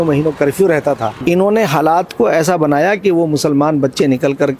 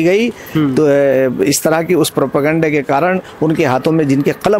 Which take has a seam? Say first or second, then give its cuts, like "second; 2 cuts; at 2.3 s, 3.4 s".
first; 1 cut; at 1.2 s